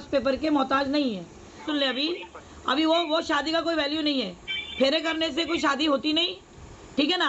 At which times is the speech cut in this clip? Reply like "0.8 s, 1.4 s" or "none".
1.6 s

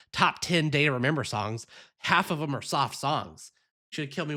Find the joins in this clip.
none

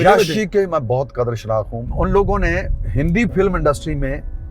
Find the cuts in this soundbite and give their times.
1.8 s, 2.8 s

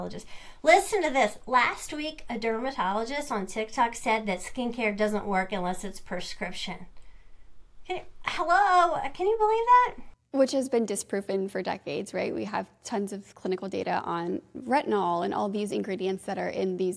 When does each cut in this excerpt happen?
none

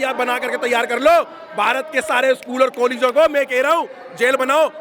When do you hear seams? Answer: none

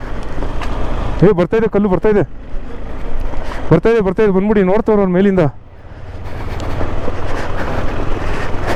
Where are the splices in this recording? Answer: none

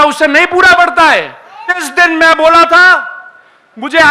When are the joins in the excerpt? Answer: 1.9 s

